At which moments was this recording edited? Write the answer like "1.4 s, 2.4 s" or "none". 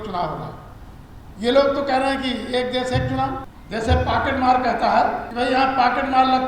3.5 s, 5.2 s